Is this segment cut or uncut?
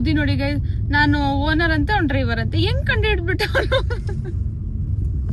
uncut